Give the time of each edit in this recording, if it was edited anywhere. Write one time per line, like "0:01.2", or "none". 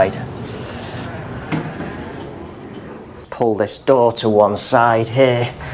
0:03.3